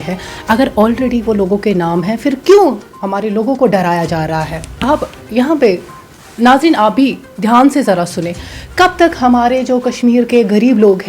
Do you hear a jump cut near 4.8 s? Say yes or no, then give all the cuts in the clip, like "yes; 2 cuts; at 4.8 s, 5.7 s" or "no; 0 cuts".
yes; 1 cut; at 4.8 s